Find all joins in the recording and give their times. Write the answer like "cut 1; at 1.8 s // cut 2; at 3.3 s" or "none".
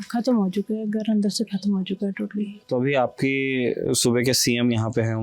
cut 1; at 2.6 s